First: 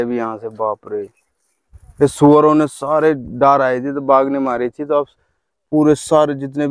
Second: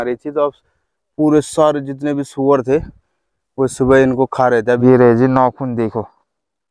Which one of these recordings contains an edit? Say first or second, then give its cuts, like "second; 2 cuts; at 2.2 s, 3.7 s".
second; 1 cut; at 4.8 s